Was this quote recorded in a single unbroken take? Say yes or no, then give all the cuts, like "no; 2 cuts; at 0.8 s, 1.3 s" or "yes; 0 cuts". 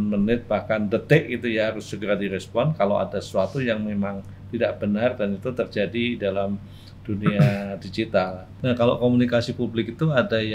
no; 1 cut; at 8.4 s